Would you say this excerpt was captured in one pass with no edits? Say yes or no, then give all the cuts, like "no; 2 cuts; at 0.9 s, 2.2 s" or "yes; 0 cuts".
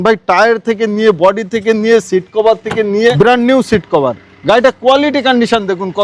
no; 1 cut; at 3.2 s